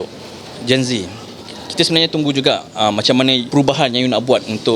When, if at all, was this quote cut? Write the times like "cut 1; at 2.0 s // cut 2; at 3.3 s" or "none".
cut 1; at 3.4 s